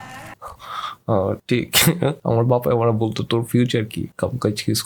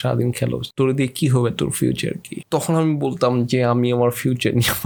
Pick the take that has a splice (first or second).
first